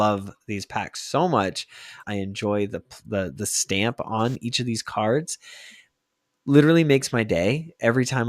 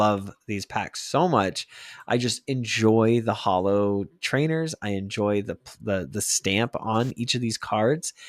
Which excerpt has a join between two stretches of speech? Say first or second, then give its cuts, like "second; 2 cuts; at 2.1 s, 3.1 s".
first; 1 cut; at 2.0 s